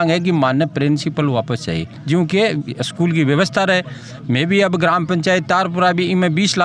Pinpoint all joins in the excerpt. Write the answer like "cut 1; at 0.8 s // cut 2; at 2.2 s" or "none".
none